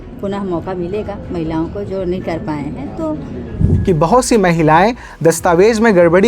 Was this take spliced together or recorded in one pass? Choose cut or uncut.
cut